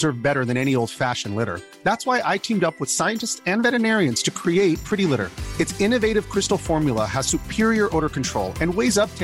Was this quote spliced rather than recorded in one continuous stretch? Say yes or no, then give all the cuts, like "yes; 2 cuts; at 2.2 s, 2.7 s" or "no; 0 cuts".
no; 0 cuts